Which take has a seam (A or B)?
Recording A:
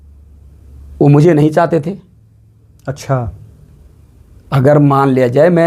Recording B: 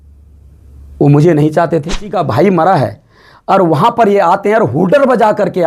B